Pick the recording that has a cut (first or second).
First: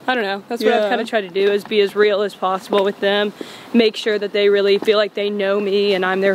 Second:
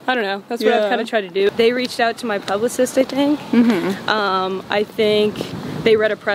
second